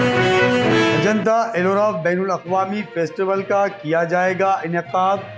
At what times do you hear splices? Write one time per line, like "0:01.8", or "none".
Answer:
0:00.9